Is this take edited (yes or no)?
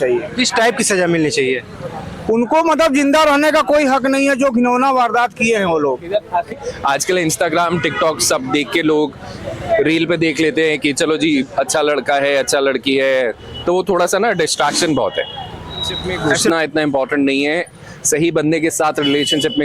yes